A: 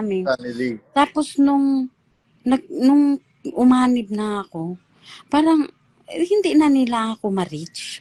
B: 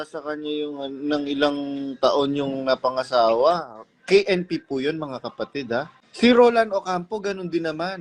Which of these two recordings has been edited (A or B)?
B